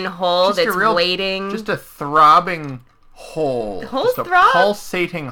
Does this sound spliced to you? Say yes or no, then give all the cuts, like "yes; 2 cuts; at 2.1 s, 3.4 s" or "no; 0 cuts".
no; 0 cuts